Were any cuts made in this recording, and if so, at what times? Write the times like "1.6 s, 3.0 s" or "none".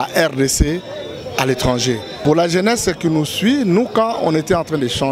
2.1 s